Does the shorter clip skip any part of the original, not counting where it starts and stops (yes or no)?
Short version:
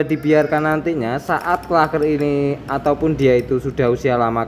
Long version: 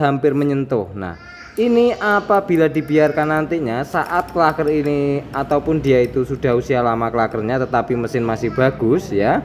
no